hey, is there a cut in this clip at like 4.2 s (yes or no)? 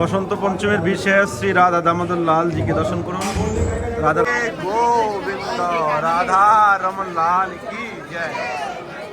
yes